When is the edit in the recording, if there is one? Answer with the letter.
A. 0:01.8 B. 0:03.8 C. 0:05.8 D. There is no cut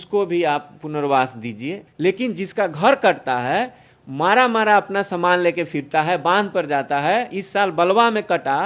A